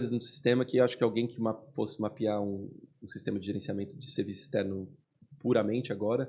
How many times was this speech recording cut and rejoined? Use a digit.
0